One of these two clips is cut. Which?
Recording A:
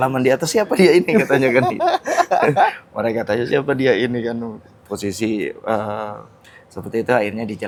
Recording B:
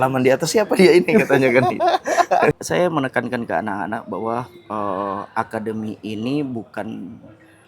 B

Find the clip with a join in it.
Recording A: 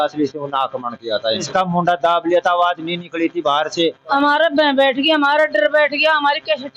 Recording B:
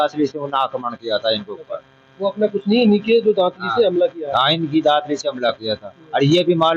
A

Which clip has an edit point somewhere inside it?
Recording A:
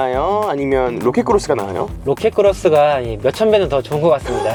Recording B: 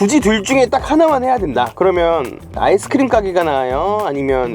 B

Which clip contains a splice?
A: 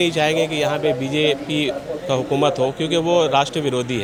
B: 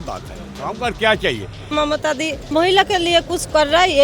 B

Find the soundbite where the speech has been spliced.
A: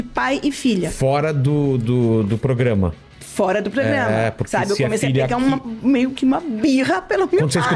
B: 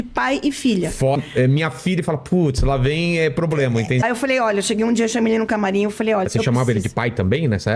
B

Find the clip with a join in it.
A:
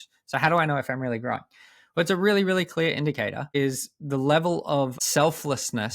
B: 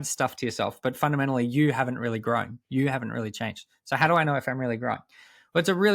A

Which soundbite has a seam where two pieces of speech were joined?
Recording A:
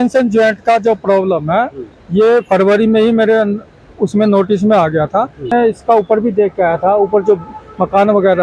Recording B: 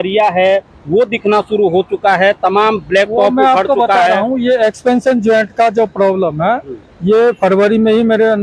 A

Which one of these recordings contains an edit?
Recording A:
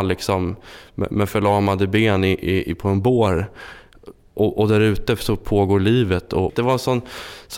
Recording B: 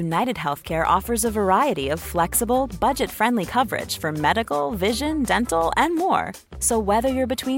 A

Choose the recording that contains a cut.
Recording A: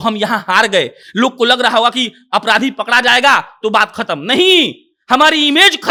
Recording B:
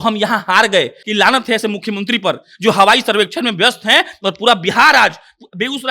B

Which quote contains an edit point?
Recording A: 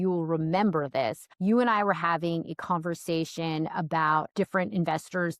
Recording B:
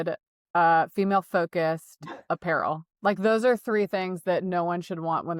A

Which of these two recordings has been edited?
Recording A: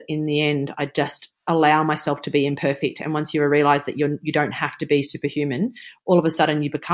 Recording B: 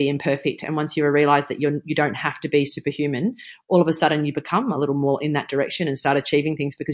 A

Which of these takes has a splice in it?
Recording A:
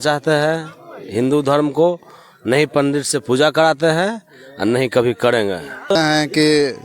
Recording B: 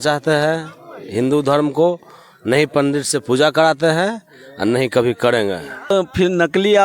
A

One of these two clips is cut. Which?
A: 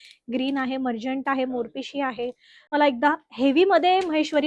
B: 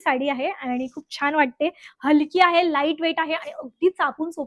A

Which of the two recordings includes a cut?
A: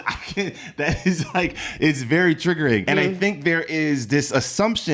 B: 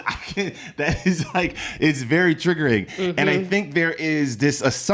A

